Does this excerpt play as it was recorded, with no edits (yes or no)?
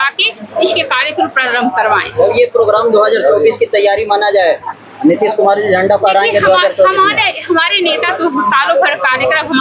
yes